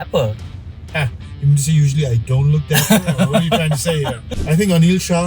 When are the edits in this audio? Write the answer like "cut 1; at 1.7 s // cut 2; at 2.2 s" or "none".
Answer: cut 1; at 4.3 s